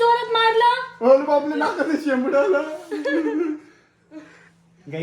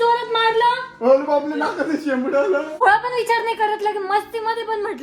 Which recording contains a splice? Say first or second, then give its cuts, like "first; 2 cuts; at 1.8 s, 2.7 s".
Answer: second; 1 cut; at 2.8 s